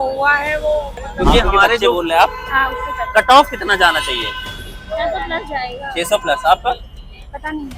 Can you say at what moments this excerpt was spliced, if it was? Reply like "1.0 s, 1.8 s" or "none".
1.9 s